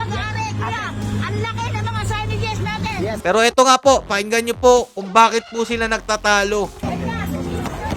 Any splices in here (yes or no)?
yes